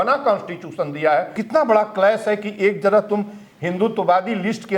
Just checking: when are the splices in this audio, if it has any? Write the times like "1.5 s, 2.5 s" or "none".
1.4 s